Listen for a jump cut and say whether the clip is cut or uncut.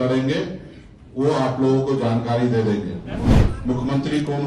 cut